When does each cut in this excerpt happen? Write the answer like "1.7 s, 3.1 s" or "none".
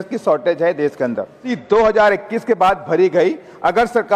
1.5 s